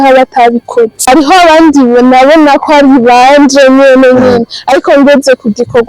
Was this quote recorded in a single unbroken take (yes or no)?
no